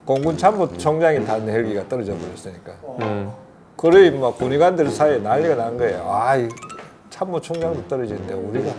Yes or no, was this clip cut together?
no